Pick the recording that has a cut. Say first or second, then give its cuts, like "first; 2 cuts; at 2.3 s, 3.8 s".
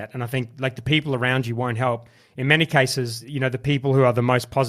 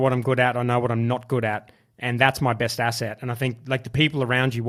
first; 1 cut; at 3.2 s